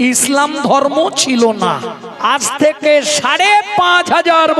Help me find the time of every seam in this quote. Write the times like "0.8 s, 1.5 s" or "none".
2.0 s